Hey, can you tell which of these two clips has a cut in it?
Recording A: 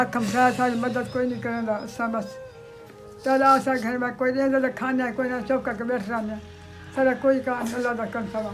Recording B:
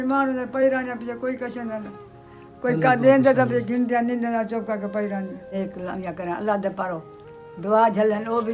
B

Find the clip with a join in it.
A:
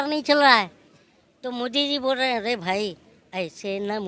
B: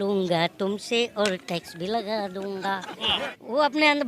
B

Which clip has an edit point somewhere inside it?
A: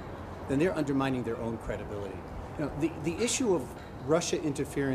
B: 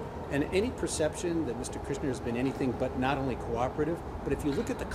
B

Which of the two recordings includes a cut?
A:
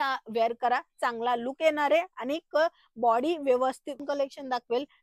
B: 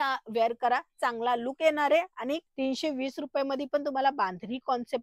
B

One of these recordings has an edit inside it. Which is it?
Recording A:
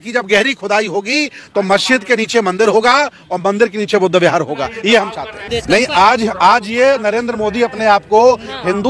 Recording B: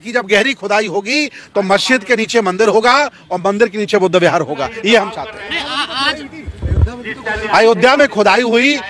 A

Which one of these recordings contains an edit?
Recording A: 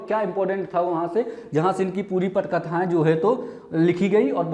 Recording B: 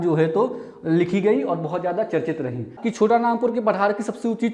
B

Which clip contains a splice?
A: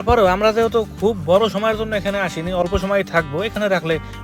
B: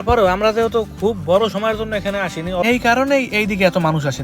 B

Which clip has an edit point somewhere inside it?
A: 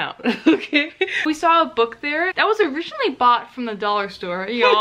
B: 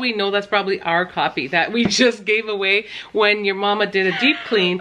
A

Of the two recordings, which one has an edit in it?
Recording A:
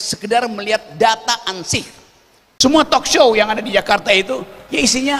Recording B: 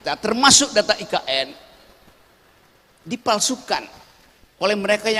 A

